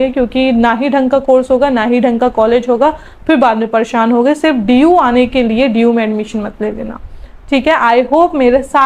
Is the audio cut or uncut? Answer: uncut